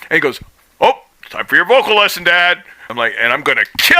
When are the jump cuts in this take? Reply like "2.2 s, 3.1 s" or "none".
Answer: 2.9 s